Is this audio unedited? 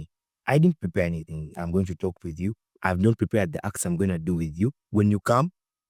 yes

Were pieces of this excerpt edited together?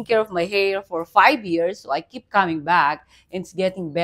no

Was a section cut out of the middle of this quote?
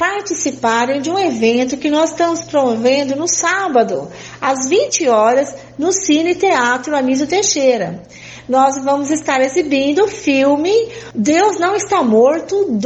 yes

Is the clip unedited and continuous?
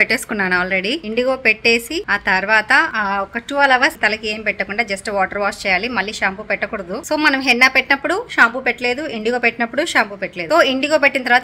yes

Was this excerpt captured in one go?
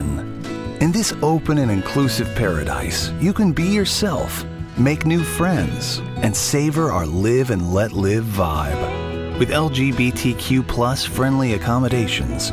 yes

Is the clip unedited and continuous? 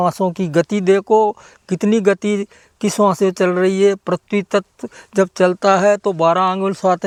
yes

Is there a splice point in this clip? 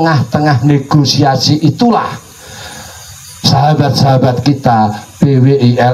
no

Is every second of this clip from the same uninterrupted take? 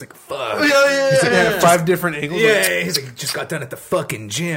yes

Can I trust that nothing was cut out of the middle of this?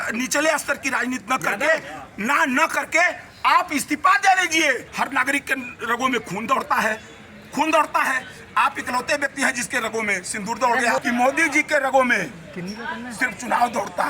no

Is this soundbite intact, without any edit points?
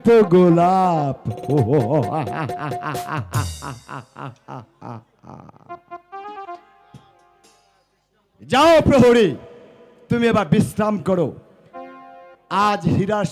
yes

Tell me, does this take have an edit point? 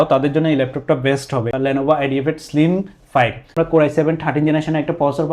yes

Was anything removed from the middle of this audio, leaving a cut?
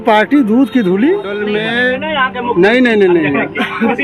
yes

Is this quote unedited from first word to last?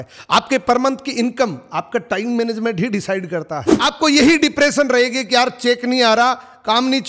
no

